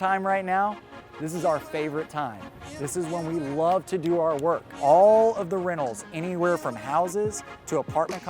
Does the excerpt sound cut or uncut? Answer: cut